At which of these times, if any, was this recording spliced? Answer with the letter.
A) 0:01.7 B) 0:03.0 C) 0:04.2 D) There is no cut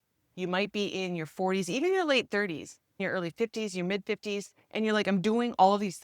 B